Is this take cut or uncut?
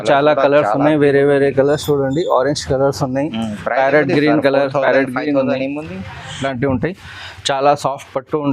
cut